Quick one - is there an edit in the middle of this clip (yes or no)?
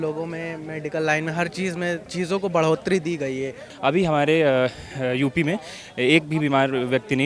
yes